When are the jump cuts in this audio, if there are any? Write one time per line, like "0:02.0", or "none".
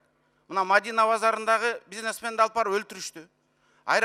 none